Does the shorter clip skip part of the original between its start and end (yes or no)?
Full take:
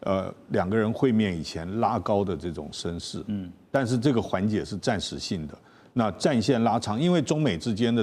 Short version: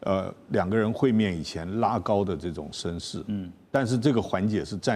no